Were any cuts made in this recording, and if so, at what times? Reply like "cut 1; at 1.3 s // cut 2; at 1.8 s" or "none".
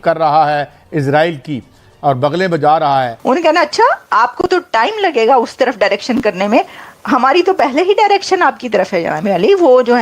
cut 1; at 3.1 s